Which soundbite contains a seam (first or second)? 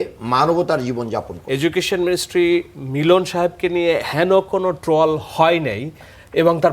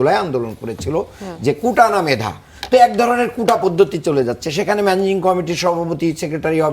first